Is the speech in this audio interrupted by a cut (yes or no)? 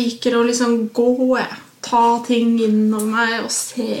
no